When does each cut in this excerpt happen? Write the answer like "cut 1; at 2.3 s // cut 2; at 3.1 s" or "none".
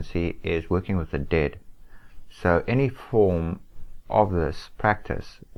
none